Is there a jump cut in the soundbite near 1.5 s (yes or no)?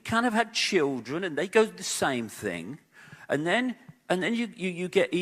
no